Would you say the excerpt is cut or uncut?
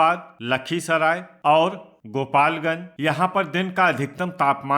cut